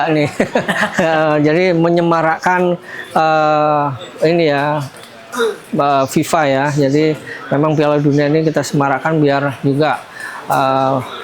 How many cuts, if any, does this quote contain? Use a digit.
0